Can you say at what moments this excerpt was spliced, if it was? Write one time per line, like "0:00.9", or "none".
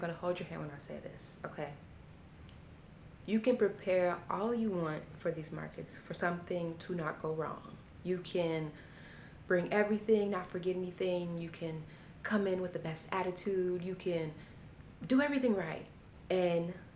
none